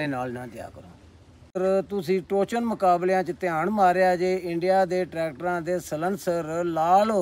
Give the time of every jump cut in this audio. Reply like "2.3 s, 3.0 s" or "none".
1.6 s